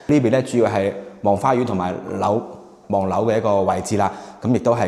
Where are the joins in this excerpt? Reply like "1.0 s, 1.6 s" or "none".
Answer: none